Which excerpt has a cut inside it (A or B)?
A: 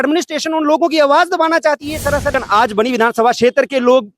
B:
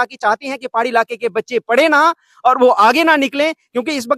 A